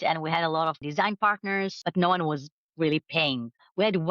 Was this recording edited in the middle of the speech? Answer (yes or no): yes